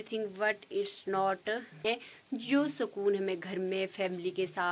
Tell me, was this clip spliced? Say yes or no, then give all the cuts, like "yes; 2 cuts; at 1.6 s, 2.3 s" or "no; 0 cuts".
yes; 1 cut; at 1.8 s